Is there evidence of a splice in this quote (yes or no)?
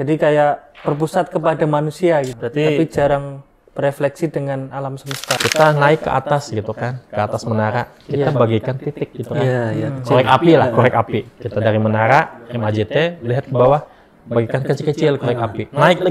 yes